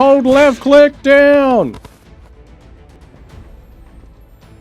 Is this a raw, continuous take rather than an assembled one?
no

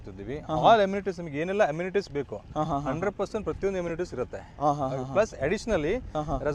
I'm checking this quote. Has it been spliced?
no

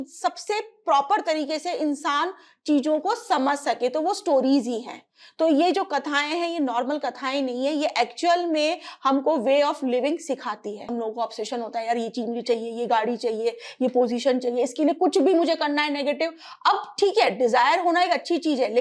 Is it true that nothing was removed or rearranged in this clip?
no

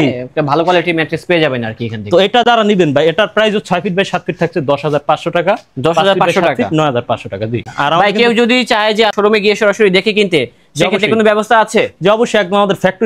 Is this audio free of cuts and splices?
yes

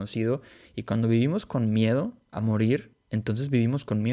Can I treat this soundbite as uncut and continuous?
no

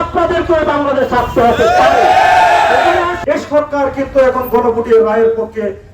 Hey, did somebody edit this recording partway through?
yes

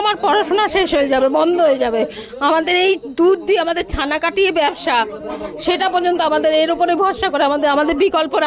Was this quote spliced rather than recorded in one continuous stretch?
no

